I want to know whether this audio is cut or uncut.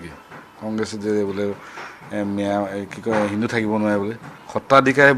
uncut